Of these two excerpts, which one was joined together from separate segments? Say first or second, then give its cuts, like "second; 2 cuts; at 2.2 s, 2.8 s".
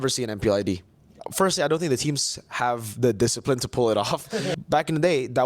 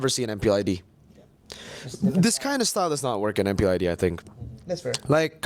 first; 2 cuts; at 1.2 s, 4.5 s